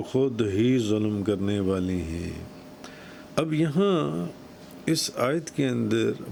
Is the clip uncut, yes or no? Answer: yes